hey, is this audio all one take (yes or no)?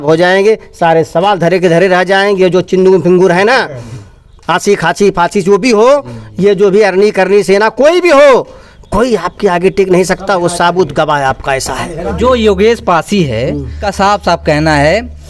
no